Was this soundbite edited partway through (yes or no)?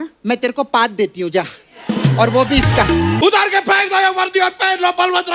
yes